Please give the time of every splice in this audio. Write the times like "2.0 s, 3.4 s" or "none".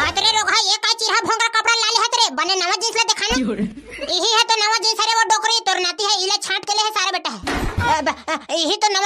7.9 s

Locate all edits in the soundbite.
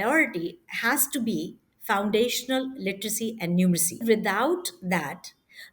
4.0 s

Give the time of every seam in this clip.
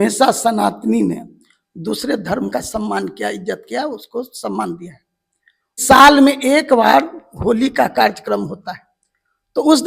5.8 s

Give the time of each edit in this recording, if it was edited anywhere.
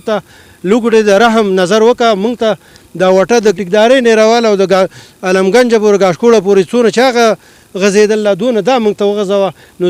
3.5 s

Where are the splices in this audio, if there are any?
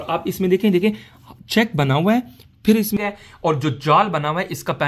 3.0 s

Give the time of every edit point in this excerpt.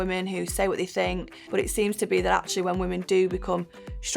1.3 s

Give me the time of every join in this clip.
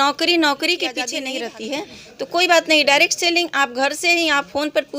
1.1 s

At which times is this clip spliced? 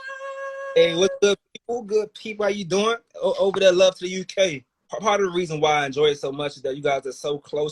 4.9 s

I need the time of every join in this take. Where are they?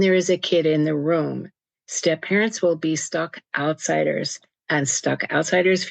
none

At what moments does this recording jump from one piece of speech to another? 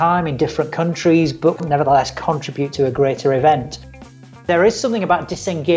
1.6 s, 2.7 s, 4.3 s

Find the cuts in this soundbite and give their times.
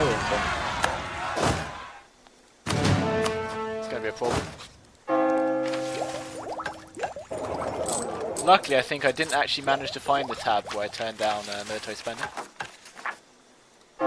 none

